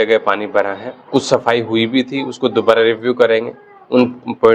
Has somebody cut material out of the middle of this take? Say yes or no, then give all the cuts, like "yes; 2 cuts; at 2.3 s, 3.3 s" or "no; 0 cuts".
yes; 1 cut; at 0.9 s